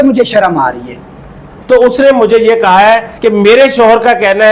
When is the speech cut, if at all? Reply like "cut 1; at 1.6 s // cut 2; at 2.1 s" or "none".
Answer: cut 1; at 1.5 s // cut 2; at 3.1 s